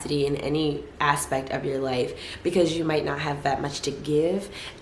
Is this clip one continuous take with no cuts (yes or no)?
yes